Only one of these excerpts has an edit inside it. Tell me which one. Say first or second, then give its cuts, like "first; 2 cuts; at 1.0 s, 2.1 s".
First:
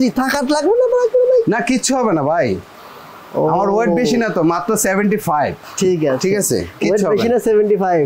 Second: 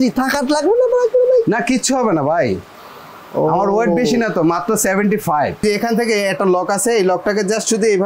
second; 1 cut; at 5.6 s